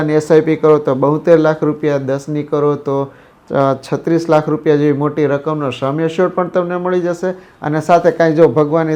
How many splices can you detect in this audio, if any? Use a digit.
0